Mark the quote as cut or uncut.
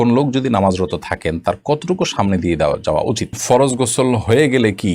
cut